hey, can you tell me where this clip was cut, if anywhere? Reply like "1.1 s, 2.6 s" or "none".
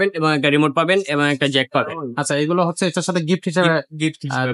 none